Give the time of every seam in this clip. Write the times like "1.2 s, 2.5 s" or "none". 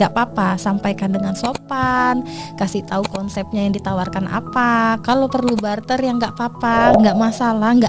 6.9 s

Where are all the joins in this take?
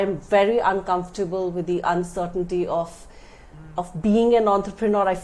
none

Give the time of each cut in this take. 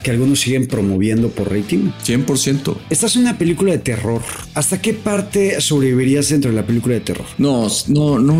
2.0 s, 2.8 s, 4.7 s, 7.2 s

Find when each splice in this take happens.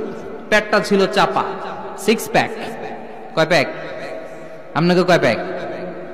none

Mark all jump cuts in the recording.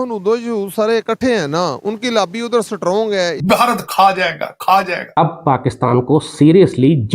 3.4 s, 5.0 s

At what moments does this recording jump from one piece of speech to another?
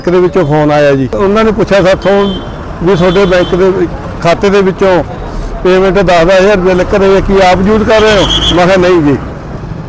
1.1 s

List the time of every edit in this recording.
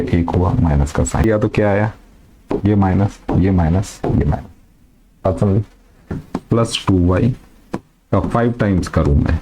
1.2 s, 6.2 s

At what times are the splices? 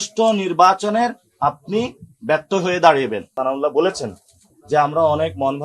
3.3 s

